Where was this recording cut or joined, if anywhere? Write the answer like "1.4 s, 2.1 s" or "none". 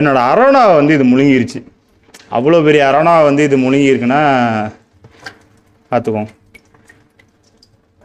none